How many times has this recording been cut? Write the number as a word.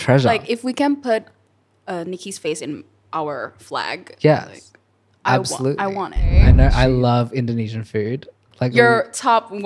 one